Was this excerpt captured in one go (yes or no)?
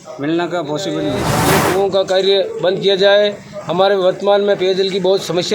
no